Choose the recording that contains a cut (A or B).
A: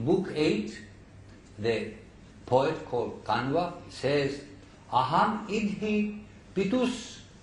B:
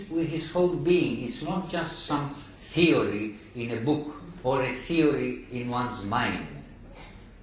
A